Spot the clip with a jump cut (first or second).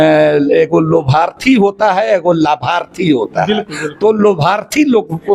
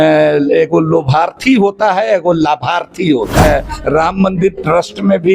second